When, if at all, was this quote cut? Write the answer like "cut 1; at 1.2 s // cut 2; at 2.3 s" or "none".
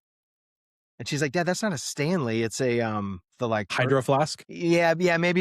cut 1; at 3.7 s // cut 2; at 4.4 s